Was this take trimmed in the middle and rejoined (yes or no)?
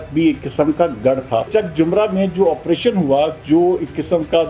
yes